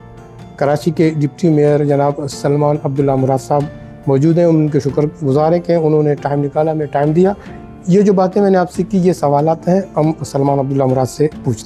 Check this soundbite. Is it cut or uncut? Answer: uncut